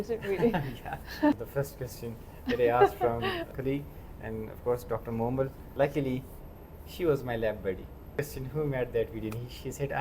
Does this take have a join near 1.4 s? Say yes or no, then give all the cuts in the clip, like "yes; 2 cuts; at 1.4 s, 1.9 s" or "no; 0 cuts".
yes; 4 cuts; at 1.4 s, 3.5 s, 5.6 s, 8.1 s